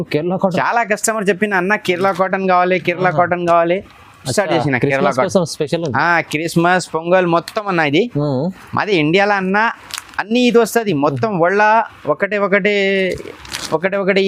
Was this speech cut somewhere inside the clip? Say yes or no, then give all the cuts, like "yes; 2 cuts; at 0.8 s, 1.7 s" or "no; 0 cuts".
no; 0 cuts